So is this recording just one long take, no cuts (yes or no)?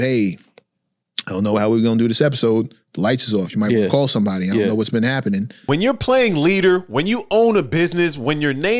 yes